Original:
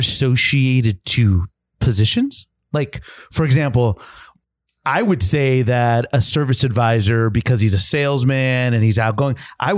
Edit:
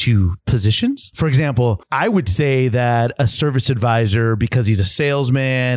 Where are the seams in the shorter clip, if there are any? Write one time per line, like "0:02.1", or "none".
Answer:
0:00.7
0:01.8